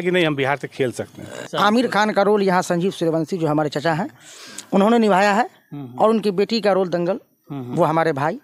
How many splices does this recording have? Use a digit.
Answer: 1